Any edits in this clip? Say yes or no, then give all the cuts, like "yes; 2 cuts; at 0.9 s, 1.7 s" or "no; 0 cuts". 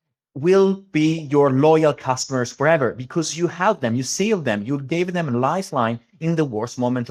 no; 0 cuts